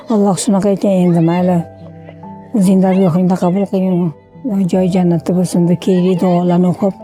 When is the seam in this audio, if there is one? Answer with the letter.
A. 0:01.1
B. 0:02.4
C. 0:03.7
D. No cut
D